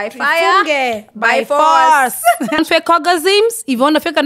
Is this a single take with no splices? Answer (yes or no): no